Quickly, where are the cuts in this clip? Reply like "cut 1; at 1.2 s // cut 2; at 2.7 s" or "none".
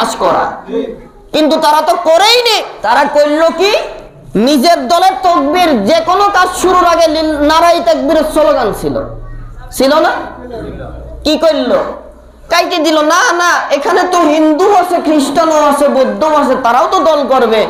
none

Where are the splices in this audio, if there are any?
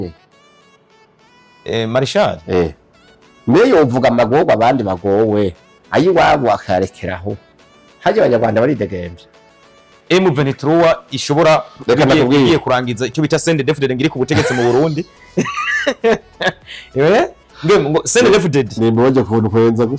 cut 1; at 9.9 s

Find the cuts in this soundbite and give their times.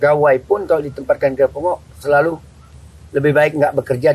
none

